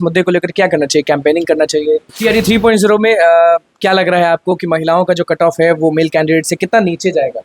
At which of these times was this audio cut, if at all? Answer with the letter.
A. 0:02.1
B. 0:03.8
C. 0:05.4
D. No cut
A